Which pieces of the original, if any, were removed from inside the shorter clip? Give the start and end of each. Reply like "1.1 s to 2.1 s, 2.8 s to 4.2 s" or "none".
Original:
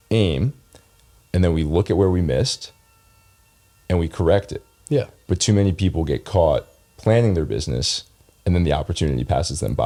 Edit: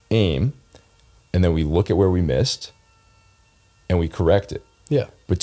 none

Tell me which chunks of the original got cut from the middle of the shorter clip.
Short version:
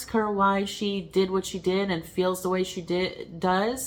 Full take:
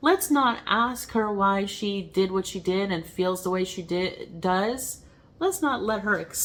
none

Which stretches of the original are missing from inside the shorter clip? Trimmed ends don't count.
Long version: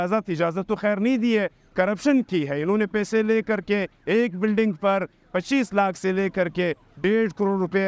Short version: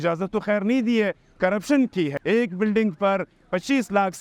2.5 s to 4.0 s

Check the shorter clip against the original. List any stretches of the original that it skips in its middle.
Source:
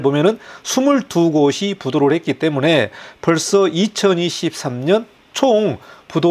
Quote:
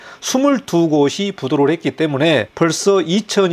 2.9 s to 3.2 s

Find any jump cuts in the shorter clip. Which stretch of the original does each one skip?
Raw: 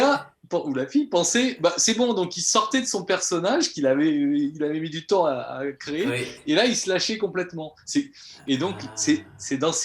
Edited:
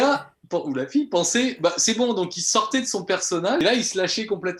3.6 s to 6.5 s

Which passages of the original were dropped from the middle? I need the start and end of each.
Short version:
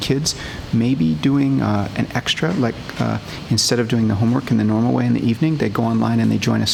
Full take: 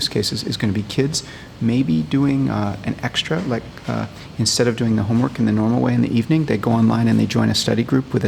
none

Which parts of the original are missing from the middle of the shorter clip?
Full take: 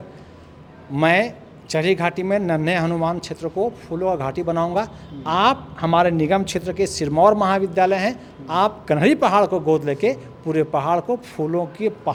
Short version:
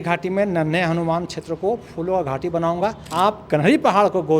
5.0 s to 8.4 s

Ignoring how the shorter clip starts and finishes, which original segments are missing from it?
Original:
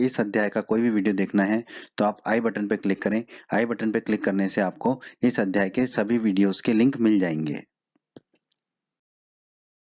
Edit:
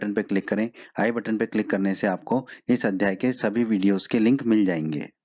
none

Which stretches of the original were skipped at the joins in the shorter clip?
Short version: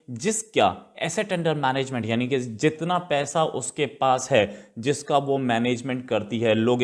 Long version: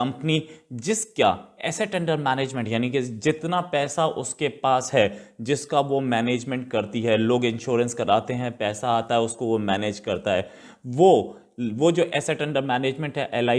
none

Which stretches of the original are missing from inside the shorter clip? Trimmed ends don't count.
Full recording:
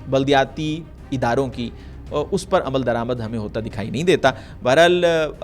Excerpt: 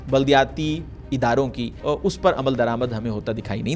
1.7 s to 2.0 s

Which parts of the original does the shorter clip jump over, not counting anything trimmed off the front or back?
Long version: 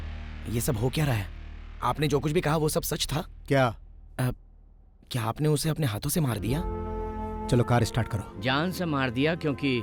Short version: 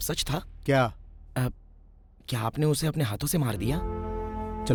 none

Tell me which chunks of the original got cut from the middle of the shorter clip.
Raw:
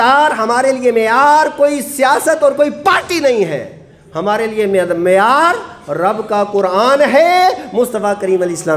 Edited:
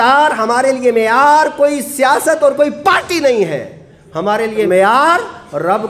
4.7 s to 5.0 s

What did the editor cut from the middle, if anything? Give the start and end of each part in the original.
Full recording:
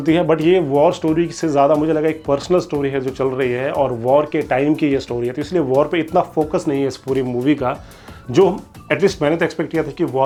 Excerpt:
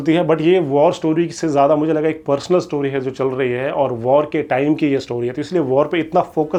none

